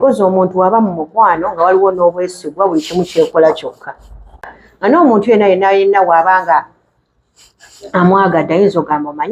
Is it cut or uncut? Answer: cut